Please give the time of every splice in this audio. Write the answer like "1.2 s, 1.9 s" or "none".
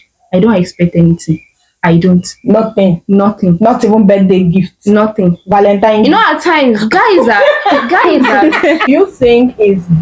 8.9 s

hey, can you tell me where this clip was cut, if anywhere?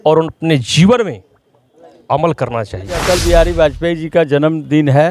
3.0 s

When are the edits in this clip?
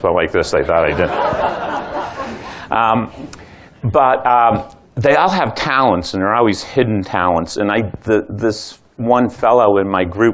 3.4 s

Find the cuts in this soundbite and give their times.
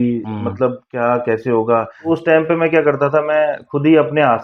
2.1 s

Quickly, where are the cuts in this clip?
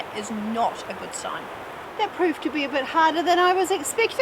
1.8 s

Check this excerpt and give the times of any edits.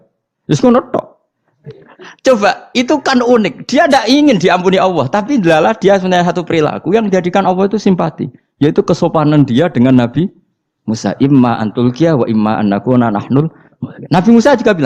1.8 s

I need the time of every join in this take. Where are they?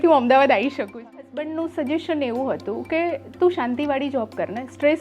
1.0 s

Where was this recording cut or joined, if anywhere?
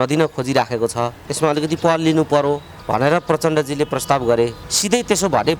1.2 s, 2.7 s, 4.7 s

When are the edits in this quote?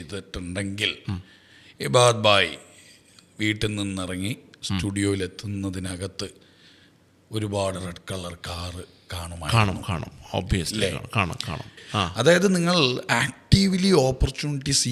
11.8 s

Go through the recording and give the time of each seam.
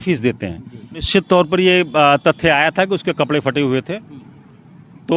1.1 s

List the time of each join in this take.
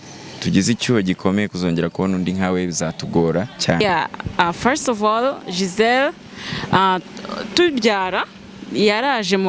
3.8 s

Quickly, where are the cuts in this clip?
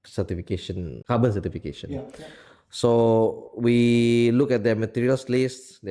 1.0 s

